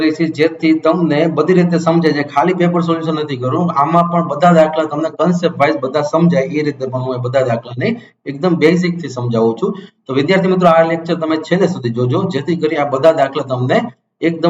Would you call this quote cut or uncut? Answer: uncut